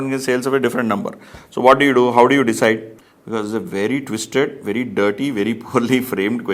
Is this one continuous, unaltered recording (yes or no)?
no